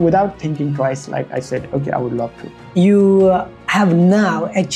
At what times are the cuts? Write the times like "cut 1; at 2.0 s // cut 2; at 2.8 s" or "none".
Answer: cut 1; at 2.6 s